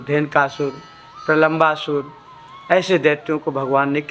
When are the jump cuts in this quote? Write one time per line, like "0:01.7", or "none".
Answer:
none